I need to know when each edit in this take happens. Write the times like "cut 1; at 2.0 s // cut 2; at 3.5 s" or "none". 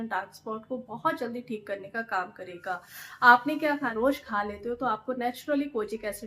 cut 1; at 3.9 s